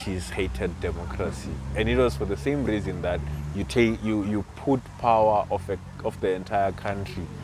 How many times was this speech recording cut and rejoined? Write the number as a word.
zero